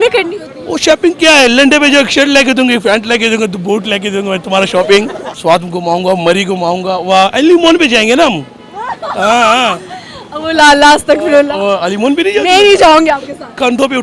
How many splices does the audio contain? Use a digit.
1